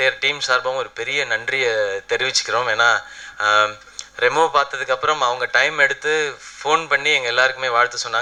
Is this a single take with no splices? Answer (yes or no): yes